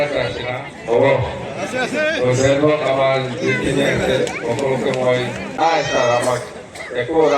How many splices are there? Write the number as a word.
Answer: one